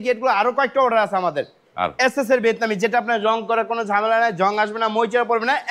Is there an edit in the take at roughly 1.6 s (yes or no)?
no